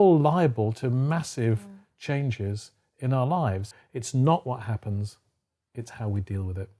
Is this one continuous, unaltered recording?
no; 1 cut; at 3.7 s

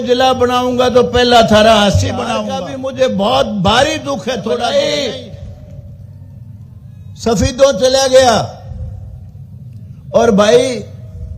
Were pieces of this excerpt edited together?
yes; 2 cuts; at 2.4 s, 4.6 s

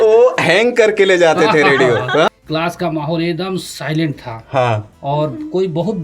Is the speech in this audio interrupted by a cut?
yes; 1 cut; at 2.3 s

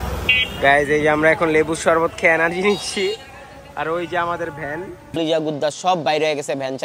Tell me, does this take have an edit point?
yes; 1 cut; at 5.0 s

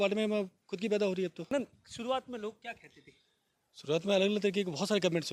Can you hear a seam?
yes; 1 cut; at 1.5 s

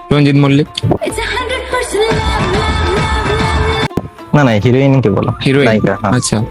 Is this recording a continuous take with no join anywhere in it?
no; 2 cuts; at 0.9 s, 3.6 s

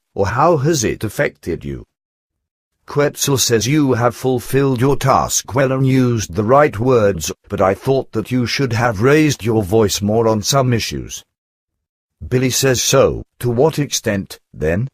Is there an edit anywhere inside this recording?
yes; 1 cut; at 13.6 s

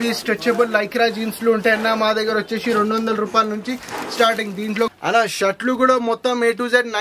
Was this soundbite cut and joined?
yes; 1 cut; at 4.9 s

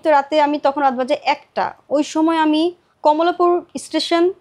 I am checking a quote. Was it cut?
yes; 1 cut; at 2.9 s

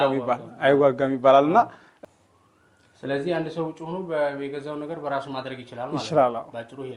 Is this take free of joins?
no; 1 cut; at 1.9 s

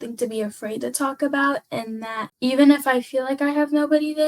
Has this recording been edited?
yes; 1 cut; at 2.2 s

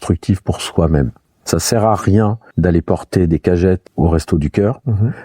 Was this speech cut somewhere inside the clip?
yes; 3 cuts; at 1.4 s, 2.4 s, 3.9 s

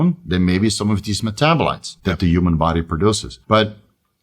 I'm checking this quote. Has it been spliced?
yes; 2 cuts; at 1.9 s, 3.3 s

